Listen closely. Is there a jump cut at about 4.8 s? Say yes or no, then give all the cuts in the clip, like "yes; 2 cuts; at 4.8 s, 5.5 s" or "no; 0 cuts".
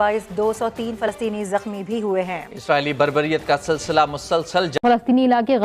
yes; 1 cut; at 4.8 s